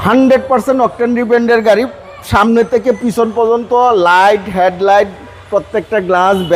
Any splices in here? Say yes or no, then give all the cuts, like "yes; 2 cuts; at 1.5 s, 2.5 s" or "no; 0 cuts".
no; 0 cuts